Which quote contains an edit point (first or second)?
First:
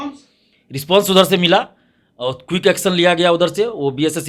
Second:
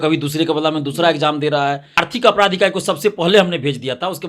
second